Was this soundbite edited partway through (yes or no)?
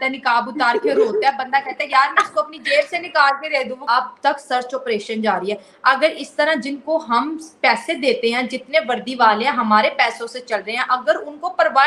yes